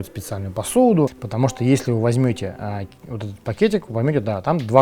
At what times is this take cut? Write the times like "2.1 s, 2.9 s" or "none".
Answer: 1.2 s